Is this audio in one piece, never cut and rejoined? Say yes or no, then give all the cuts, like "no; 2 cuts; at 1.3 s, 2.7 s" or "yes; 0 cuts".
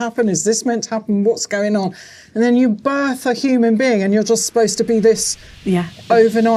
yes; 0 cuts